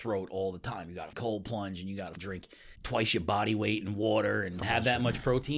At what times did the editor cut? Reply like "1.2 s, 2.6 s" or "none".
1.1 s, 2.4 s, 4.6 s